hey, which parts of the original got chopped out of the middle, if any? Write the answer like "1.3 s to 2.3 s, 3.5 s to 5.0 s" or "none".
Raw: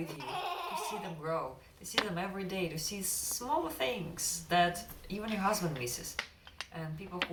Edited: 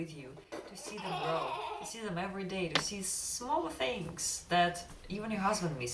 none